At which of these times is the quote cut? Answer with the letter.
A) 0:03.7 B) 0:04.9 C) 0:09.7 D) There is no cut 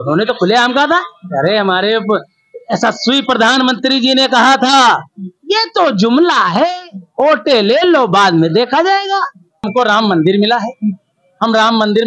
C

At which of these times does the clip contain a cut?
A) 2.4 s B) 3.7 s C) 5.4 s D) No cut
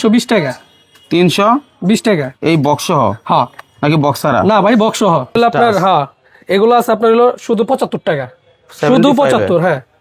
C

